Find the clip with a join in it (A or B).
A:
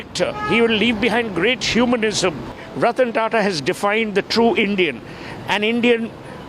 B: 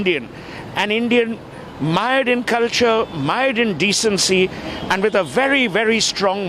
A